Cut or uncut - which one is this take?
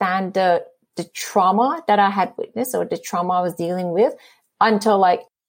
uncut